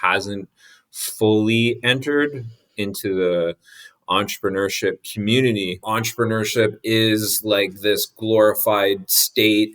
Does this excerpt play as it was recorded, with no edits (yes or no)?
no